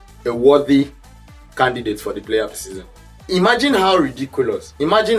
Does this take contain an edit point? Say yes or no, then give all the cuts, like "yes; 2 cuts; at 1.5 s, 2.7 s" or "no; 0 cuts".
yes; 1 cut; at 3.1 s